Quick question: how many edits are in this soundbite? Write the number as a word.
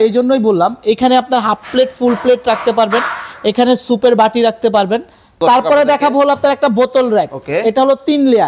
one